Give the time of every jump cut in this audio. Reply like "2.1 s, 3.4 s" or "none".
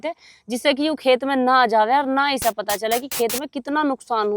none